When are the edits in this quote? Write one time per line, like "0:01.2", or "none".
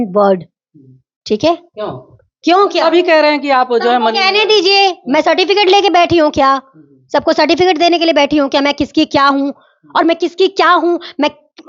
none